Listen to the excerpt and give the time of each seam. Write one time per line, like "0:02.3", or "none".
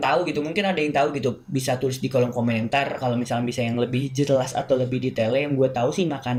none